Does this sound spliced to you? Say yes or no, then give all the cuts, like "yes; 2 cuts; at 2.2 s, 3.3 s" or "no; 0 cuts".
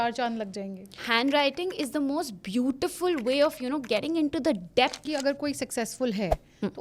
yes; 2 cuts; at 1.0 s, 5.0 s